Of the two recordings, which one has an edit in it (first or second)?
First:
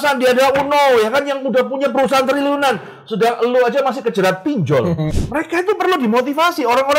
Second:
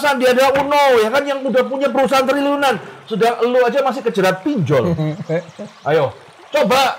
first